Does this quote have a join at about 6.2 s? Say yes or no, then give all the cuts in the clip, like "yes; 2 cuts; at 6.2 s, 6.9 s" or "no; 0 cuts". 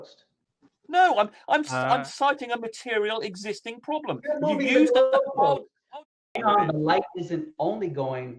yes; 1 cut; at 6.2 s